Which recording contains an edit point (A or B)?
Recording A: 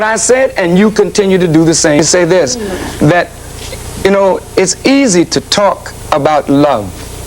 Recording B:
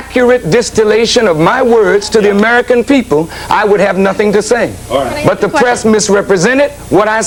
A